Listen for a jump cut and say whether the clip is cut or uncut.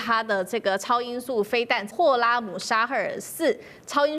cut